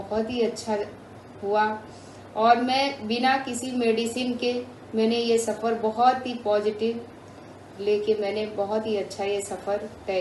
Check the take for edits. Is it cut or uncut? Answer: uncut